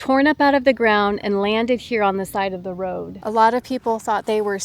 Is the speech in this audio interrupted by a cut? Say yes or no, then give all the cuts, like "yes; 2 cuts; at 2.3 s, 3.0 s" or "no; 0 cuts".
yes; 1 cut; at 3.1 s